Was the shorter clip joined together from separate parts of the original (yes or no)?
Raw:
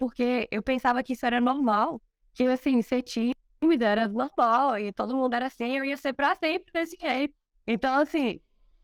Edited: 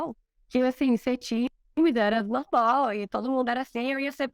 no